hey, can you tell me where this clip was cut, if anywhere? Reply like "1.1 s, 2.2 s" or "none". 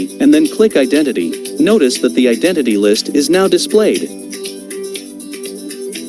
1.4 s, 4.1 s